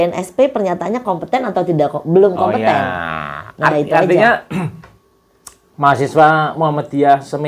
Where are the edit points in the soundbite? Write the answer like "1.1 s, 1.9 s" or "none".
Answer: none